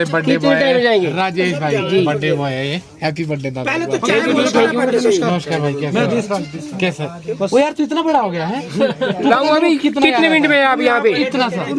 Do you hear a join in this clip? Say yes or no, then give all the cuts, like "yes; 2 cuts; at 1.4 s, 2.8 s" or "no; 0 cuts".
no; 0 cuts